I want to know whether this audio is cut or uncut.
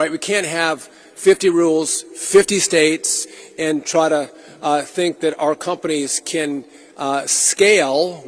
uncut